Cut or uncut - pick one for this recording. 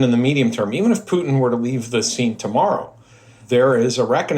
cut